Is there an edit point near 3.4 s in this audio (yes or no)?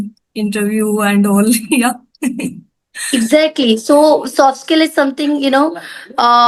no